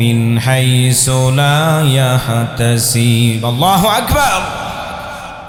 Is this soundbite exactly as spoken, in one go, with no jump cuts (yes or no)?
yes